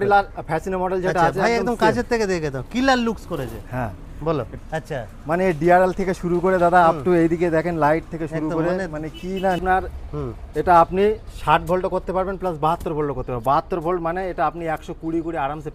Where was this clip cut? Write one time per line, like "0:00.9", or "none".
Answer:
0:04.5
0:09.6